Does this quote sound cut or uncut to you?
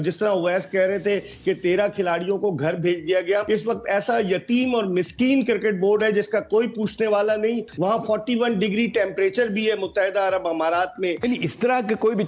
cut